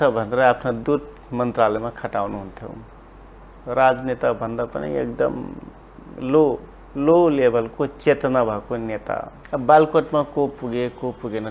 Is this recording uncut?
no; 1 cut; at 9.3 s

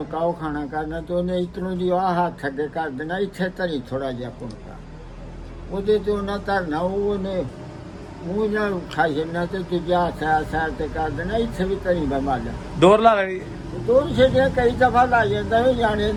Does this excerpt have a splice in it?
no; 0 cuts

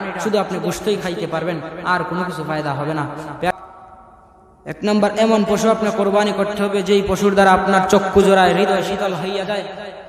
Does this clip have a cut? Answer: yes; 1 cut; at 3.5 s

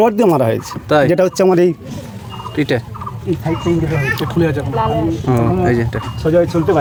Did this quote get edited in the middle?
no; 0 cuts

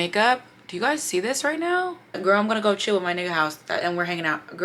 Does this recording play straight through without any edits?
no; 1 cut; at 2.2 s

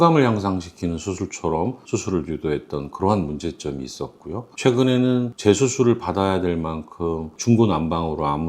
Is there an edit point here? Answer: yes; 1 cut; at 1.8 s

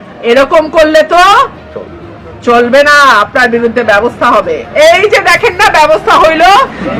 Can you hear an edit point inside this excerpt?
yes; 1 cut; at 4.6 s

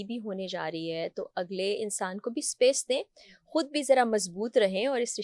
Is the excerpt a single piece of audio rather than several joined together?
yes; 0 cuts

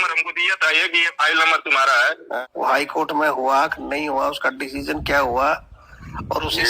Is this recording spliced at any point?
yes; 1 cut; at 2.5 s

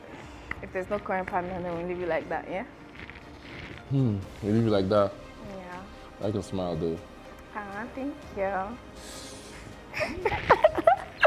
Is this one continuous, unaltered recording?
yes; 0 cuts

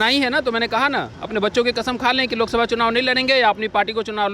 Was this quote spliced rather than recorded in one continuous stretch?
no; 0 cuts

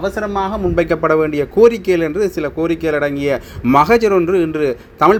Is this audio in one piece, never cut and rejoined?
yes; 0 cuts

